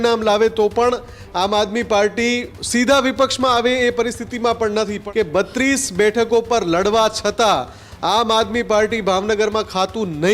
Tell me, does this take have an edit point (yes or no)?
yes